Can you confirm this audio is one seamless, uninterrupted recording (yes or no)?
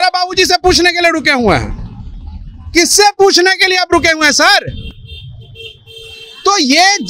yes